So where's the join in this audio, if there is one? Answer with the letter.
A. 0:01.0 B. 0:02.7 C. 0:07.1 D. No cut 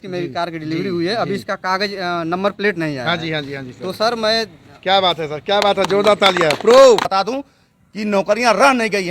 C